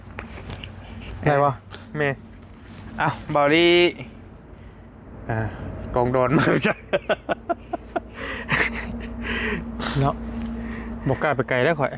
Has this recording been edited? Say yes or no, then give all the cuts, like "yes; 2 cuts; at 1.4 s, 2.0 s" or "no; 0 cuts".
no; 0 cuts